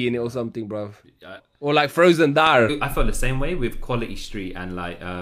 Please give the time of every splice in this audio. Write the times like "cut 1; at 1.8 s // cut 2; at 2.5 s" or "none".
cut 1; at 1.4 s // cut 2; at 2.7 s